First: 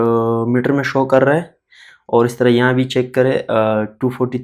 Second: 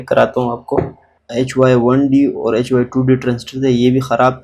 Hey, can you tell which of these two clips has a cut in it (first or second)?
second